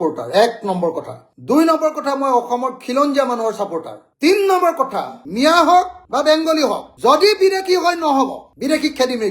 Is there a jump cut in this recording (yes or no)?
yes